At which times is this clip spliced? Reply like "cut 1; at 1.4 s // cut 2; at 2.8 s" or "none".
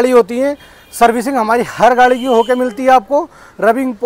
none